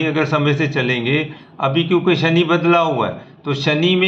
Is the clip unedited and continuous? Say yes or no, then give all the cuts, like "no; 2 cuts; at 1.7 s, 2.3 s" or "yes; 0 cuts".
yes; 0 cuts